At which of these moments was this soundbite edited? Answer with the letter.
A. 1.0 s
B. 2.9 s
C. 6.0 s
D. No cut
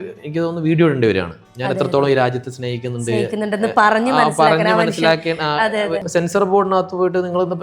C